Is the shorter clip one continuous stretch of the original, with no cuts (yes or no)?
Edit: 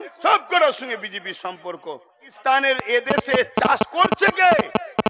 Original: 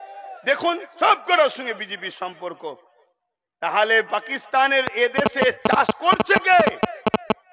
no